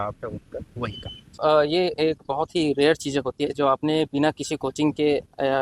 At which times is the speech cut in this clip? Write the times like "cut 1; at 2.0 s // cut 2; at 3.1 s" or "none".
cut 1; at 1.4 s